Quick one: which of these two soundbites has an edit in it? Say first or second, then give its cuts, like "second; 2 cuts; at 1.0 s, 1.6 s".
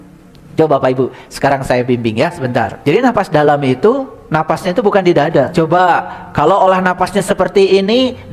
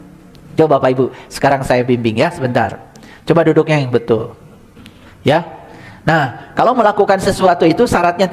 first; 2 cuts; at 2.8 s, 5.3 s